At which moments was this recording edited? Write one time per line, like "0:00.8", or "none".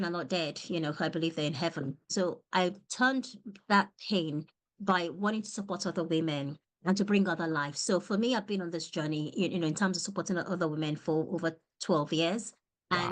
0:02.1